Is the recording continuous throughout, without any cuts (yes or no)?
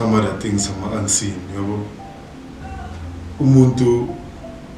no